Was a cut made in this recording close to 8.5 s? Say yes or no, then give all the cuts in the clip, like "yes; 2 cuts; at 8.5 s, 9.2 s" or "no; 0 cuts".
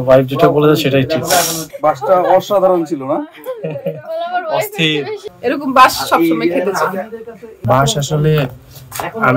no; 2 cuts; at 1.7 s, 5.2 s